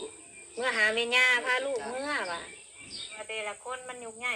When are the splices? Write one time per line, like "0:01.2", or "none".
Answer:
0:03.2